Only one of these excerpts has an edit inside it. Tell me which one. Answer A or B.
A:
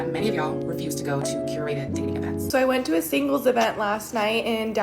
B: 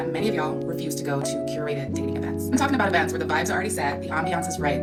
A